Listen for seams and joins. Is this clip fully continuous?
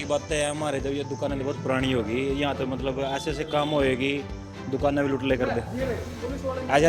yes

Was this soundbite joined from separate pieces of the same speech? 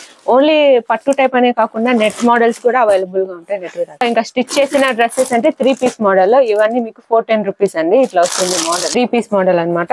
yes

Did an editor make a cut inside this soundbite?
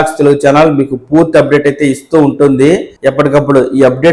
yes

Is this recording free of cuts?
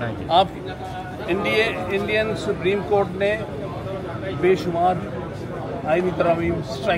yes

